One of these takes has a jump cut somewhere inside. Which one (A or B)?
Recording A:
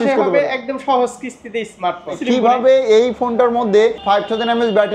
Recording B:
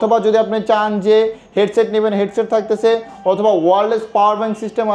A